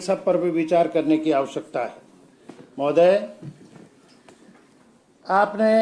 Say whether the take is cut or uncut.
uncut